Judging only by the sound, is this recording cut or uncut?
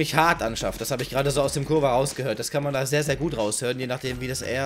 uncut